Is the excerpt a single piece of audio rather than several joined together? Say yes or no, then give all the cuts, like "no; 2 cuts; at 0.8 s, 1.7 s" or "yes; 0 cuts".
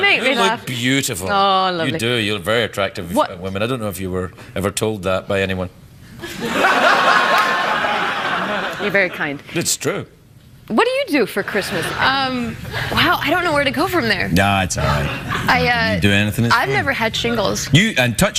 yes; 0 cuts